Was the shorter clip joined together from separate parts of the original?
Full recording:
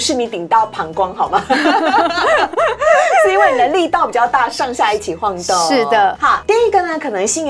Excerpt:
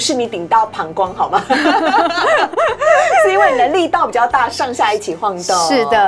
no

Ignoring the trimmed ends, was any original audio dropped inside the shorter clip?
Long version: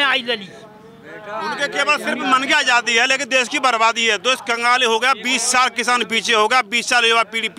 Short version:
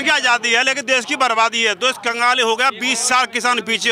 no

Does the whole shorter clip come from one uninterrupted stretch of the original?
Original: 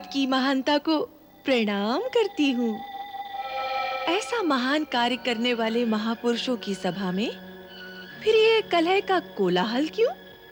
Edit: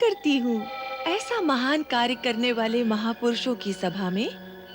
no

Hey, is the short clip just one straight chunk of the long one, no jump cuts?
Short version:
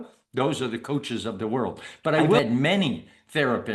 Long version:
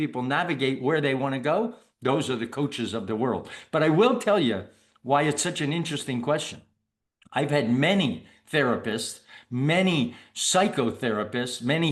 no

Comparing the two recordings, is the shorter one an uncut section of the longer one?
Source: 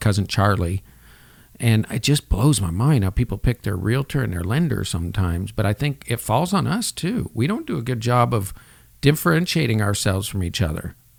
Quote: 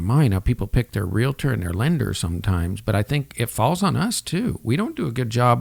yes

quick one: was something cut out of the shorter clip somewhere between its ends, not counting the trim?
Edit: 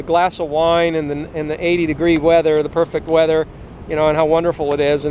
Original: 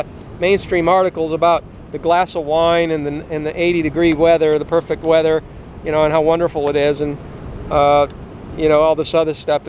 no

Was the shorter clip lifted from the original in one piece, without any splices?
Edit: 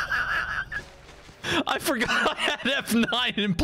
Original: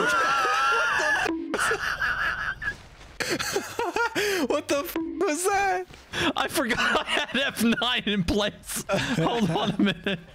no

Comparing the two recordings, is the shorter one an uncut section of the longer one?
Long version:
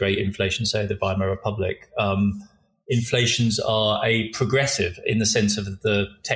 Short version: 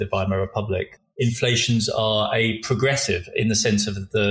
no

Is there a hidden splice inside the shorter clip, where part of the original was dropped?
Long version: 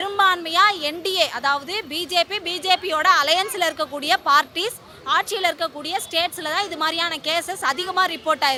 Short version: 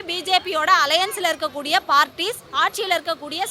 yes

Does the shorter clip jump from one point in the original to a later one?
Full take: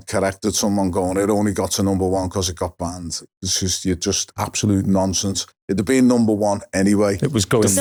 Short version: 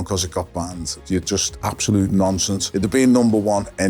yes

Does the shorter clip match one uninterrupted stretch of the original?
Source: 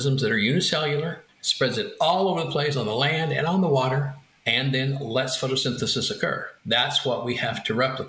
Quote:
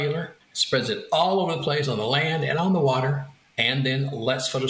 yes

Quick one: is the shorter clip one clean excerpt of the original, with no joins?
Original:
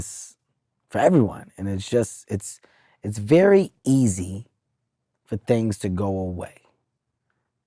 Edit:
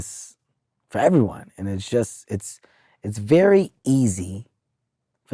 yes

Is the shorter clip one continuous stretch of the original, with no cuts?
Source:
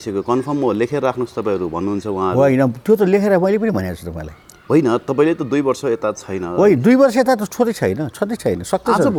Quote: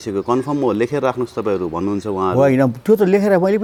yes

